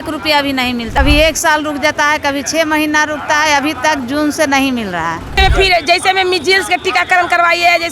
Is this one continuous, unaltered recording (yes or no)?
no